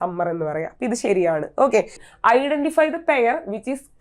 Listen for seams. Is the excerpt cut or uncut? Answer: cut